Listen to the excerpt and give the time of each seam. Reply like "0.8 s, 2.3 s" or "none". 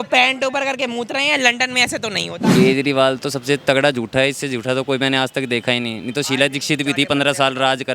2.3 s